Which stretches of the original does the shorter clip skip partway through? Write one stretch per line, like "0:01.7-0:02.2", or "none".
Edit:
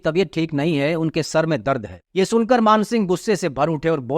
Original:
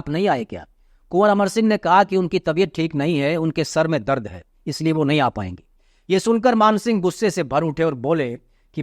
0:04.4-0:05.9